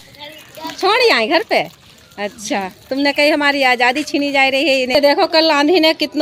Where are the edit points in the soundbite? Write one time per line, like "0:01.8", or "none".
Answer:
0:04.9

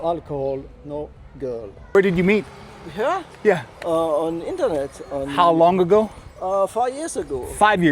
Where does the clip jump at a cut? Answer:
0:01.9

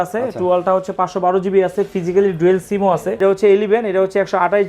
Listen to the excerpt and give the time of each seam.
0:03.2

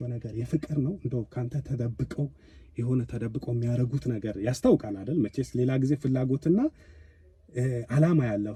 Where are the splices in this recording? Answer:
none

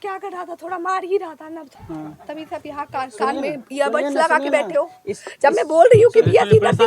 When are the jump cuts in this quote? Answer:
0:01.7

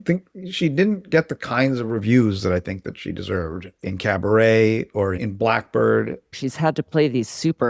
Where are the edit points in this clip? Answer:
0:06.4

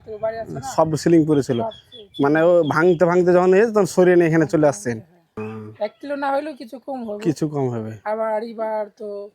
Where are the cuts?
0:05.4

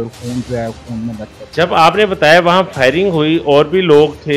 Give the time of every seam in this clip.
0:01.3

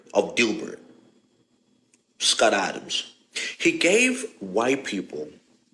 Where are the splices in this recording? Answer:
none

